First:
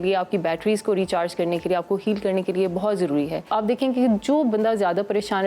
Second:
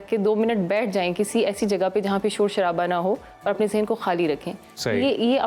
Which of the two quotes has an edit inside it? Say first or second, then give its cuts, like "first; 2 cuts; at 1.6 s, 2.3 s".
first; 1 cut; at 3.5 s